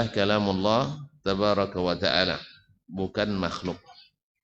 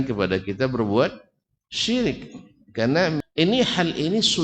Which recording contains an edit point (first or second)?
second